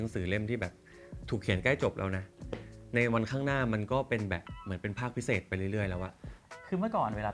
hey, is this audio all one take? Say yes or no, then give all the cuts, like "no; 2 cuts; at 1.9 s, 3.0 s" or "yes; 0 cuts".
no; 1 cut; at 6.3 s